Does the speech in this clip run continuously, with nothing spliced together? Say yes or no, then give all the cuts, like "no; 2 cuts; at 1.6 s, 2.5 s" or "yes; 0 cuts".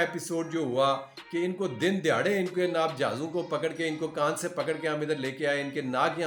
yes; 0 cuts